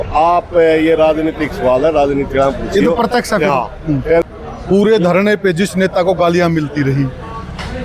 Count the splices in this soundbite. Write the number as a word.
one